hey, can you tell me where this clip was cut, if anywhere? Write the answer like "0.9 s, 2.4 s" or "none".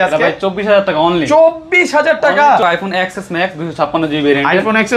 2.6 s